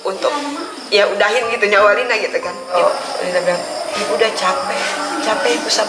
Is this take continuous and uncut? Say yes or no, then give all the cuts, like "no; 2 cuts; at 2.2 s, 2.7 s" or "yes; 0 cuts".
no; 1 cut; at 2.8 s